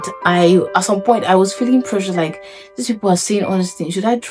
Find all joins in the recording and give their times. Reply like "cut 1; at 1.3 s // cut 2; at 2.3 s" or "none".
none